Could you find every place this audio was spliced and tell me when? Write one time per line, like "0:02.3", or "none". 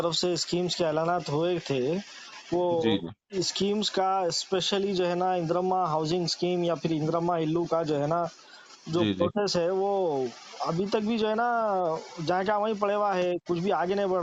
none